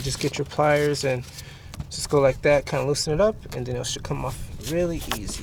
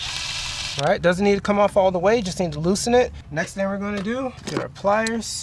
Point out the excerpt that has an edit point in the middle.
second; 3 cuts; at 0.7 s, 3.2 s, 4.4 s

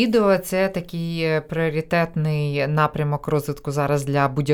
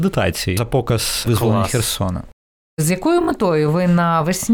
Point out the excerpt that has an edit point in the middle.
second; 2 cuts; at 0.8 s, 2.8 s

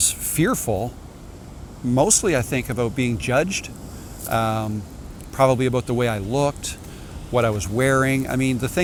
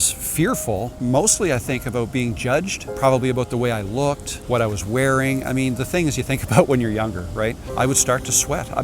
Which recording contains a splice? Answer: second; 4 cuts; at 0.9 s, 2.8 s, 4.3 s, 7.6 s

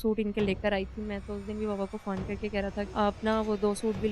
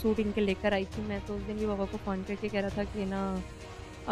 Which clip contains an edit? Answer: first; 1 cut; at 2.9 s

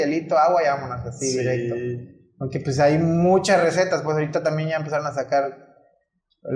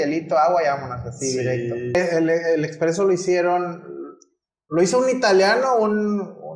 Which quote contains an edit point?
second; 1 cut; at 1.9 s

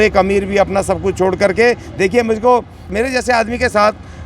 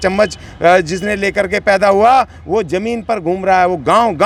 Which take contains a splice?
first; 1 cut; at 2.9 s

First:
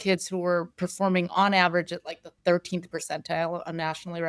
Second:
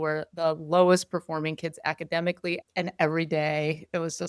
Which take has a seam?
second; 1 cut; at 2.6 s

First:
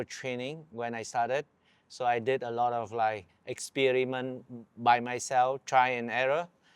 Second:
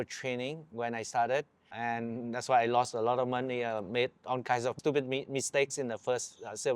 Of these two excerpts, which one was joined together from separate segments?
second; 1 cut; at 1.7 s

